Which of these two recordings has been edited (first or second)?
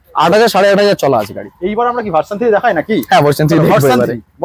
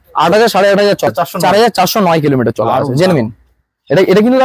second